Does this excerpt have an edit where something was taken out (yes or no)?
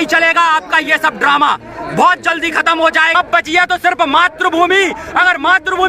yes